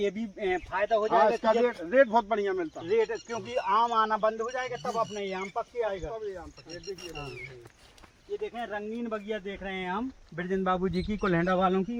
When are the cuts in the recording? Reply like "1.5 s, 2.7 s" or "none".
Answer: none